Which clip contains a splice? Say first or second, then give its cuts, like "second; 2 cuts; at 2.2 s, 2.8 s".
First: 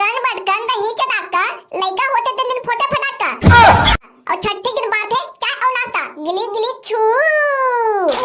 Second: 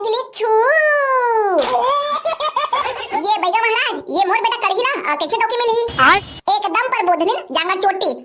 second; 1 cut; at 2.8 s